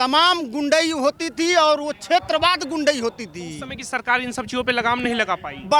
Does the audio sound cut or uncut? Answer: uncut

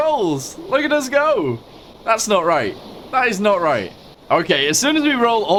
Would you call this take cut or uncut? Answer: uncut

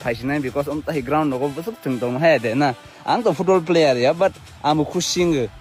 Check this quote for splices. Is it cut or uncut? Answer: uncut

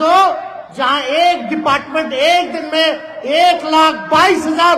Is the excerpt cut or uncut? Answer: uncut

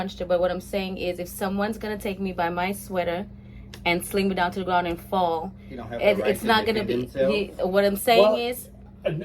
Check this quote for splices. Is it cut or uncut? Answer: uncut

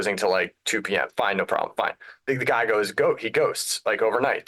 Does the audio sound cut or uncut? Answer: cut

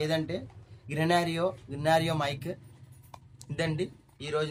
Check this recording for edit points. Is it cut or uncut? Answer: uncut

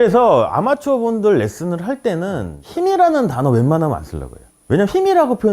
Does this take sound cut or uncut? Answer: cut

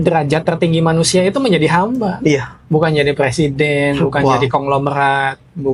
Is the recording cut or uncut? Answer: uncut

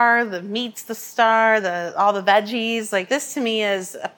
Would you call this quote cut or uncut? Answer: cut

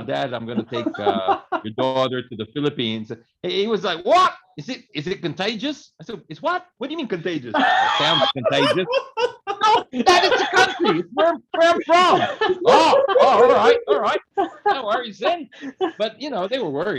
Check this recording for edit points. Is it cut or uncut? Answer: uncut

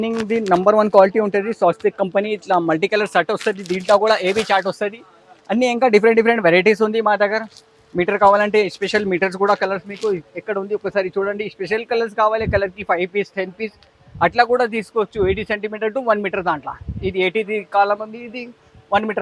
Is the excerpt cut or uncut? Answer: uncut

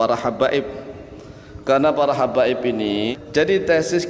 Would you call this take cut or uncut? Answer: cut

